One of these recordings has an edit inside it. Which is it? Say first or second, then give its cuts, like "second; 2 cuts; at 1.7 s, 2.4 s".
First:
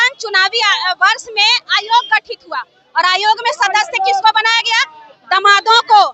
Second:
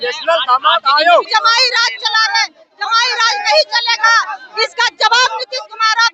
second; 1 cut; at 1.3 s